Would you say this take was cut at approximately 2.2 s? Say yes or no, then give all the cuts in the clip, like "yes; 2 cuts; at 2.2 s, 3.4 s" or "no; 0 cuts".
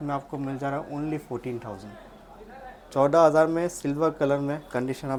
no; 0 cuts